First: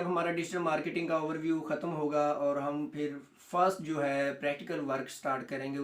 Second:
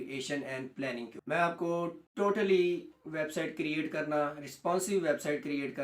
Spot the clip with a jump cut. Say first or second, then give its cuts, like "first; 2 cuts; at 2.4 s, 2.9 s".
second; 2 cuts; at 1.2 s, 2.0 s